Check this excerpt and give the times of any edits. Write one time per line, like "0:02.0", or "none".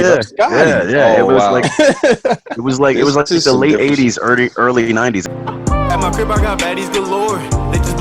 0:05.2

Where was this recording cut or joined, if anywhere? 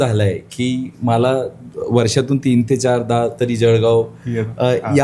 none

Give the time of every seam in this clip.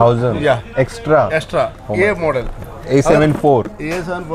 none

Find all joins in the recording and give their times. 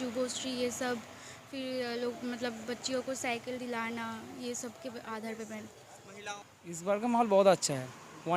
0:06.4

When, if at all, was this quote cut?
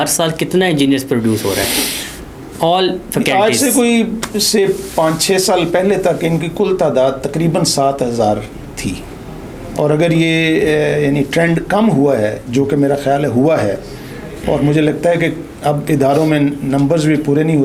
none

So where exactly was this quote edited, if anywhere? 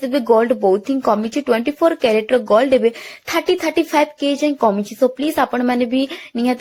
none

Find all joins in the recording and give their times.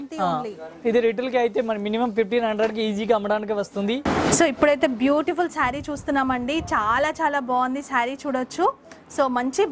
0:04.0

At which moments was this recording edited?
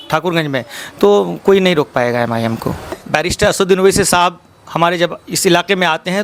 0:03.0

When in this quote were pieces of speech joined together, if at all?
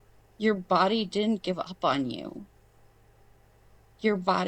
none

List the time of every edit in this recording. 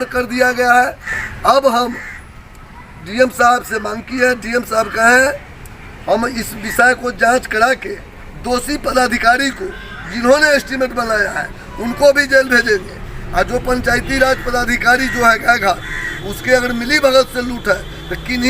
0:01.4

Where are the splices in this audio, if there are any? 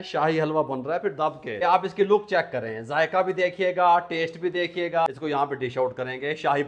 0:01.6
0:05.1

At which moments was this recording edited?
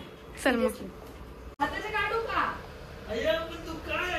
0:01.4

